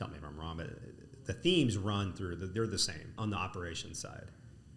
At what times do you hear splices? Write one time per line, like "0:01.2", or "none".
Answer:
0:03.2